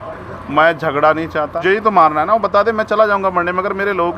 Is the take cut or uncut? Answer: cut